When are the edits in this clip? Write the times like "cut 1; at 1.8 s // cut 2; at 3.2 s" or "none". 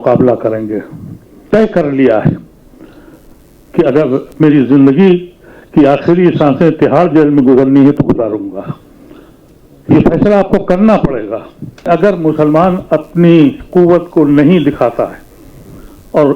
cut 1; at 1.5 s // cut 2; at 11.9 s